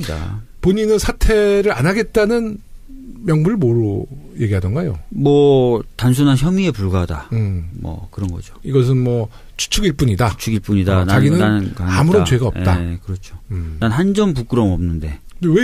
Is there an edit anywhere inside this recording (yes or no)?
yes